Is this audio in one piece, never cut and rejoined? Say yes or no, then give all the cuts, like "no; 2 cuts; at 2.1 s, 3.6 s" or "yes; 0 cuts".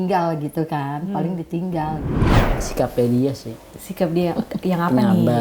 no; 1 cut; at 2.4 s